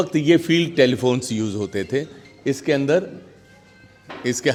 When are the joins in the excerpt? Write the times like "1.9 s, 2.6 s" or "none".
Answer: none